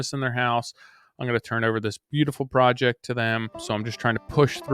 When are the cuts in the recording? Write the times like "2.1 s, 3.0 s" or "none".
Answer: 3.6 s